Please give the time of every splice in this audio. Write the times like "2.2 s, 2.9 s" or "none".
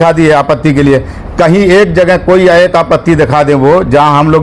none